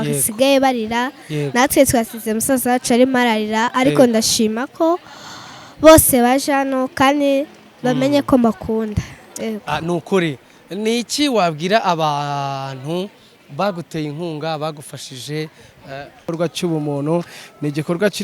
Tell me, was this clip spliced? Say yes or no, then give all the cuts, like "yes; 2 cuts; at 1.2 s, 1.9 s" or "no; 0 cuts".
yes; 1 cut; at 16.3 s